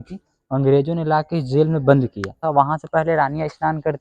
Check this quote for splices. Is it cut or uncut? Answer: cut